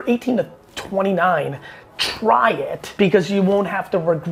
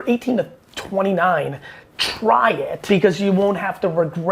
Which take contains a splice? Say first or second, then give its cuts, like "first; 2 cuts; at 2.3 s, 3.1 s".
second; 1 cut; at 2.8 s